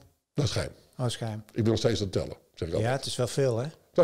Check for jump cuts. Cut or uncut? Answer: uncut